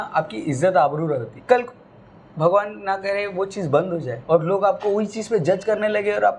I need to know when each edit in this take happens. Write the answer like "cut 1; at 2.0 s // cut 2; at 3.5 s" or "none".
cut 1; at 1.3 s // cut 2; at 4.1 s